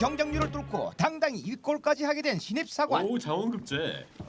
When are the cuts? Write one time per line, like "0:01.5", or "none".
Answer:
0:02.4